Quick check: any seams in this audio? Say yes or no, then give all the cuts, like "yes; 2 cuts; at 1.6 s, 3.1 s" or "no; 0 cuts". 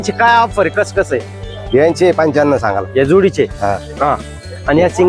no; 0 cuts